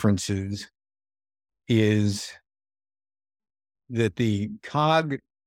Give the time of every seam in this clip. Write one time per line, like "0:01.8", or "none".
none